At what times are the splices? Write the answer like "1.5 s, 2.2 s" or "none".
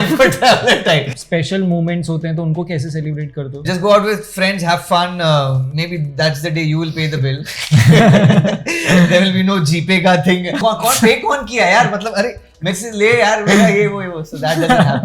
1.1 s, 3.7 s, 10.6 s